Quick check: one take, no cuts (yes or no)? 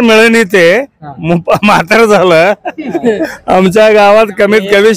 no